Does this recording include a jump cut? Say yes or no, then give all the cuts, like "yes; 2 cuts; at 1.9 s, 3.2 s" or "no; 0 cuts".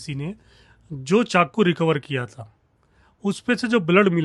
no; 0 cuts